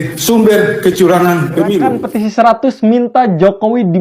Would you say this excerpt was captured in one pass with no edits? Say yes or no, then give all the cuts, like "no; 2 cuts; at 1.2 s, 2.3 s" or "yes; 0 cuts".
no; 1 cut; at 2.0 s